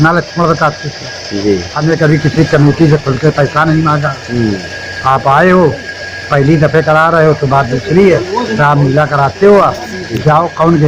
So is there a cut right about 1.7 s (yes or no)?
yes